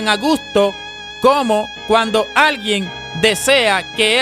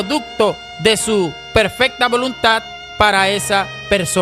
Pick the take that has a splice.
first; 1 cut; at 2.3 s

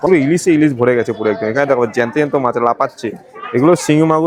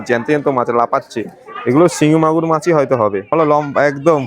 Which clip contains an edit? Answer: second; 1 cut; at 3.3 s

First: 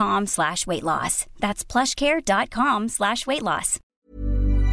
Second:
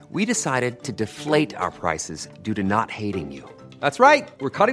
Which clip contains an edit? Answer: first; 1 cut; at 3.8 s

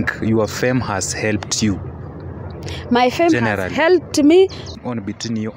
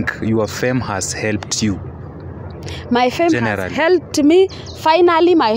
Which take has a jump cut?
first; 1 cut; at 4.7 s

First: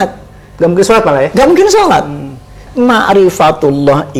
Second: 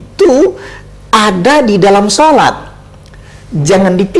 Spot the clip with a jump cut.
first; 1 cut; at 2.6 s

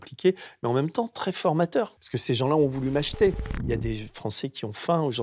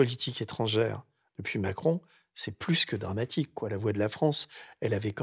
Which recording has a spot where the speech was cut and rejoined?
first; 2 cuts; at 2.0 s, 3.5 s

